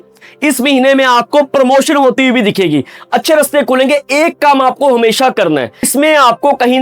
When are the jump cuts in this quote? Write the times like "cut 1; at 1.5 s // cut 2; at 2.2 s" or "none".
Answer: cut 1; at 2.9 s // cut 2; at 5.9 s